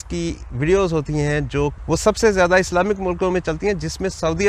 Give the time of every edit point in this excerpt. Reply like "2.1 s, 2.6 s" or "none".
1.8 s